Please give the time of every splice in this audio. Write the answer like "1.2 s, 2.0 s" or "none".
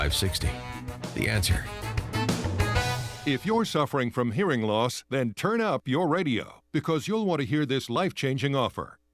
3.1 s